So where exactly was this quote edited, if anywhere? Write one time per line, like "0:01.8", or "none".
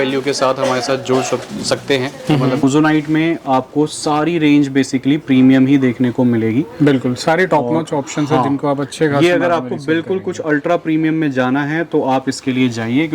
0:02.6